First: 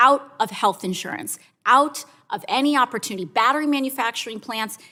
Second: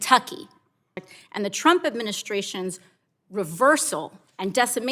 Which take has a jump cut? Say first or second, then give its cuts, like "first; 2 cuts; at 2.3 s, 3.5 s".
second; 1 cut; at 1.1 s